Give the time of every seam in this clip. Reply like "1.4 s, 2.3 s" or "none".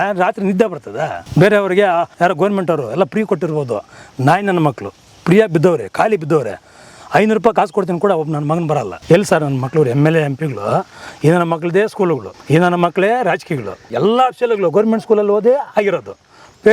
1.2 s, 2.1 s, 8.9 s, 12.3 s, 13.9 s